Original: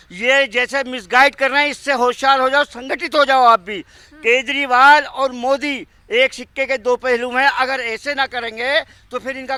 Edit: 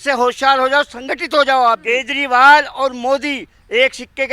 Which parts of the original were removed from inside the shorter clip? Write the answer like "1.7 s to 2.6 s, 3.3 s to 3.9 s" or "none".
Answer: 3.6 s to 4.2 s

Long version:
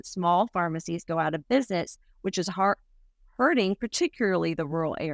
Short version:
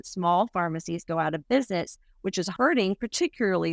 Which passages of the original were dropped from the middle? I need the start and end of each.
2.5 s to 3.3 s

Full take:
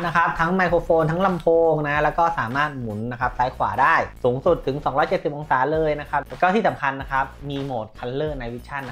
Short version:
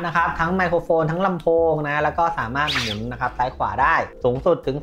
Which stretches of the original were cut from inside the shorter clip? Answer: none

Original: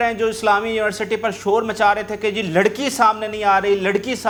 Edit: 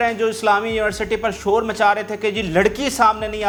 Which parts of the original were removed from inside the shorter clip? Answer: none

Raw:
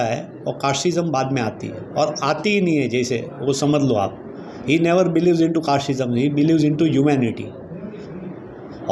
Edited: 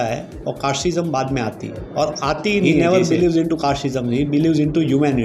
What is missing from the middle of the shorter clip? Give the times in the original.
2.7 s to 4.7 s

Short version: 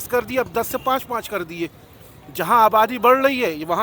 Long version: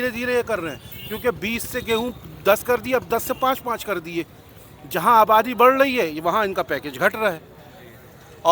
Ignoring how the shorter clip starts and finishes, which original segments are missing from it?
none

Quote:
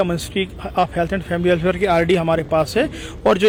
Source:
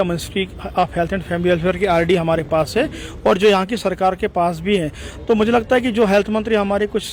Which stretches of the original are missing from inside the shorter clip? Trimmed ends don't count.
none

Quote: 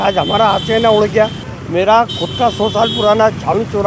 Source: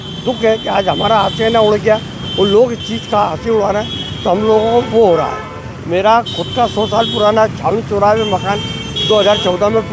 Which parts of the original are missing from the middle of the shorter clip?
2.2 s to 5.6 s

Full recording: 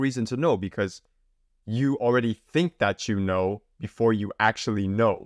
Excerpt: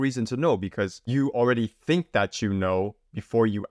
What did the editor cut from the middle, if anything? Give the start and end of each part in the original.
1.0 s to 1.7 s

